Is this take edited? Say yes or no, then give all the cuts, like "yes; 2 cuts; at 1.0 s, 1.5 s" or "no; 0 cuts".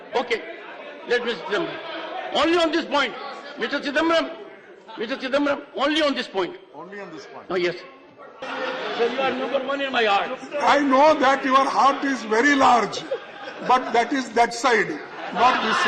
yes; 1 cut; at 8.4 s